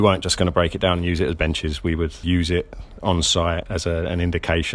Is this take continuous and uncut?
no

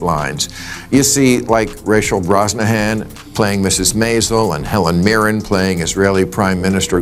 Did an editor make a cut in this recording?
no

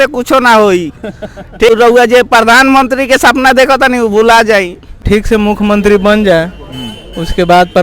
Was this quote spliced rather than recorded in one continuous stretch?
yes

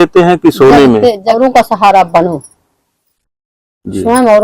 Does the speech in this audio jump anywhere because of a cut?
yes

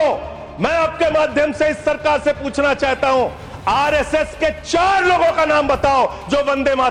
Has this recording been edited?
no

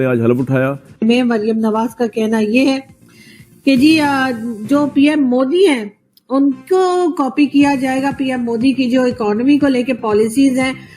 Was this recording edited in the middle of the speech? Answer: yes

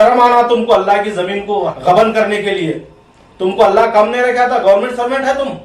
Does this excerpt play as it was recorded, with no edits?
no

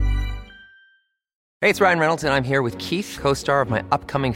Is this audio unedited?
no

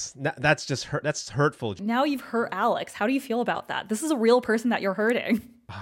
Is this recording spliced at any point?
yes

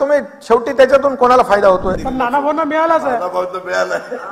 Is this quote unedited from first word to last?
no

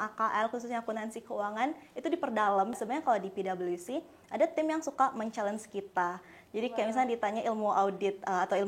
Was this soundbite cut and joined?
yes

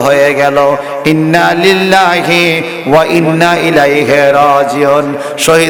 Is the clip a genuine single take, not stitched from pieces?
yes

